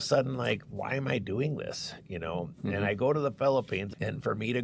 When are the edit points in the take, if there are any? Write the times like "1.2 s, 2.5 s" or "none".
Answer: none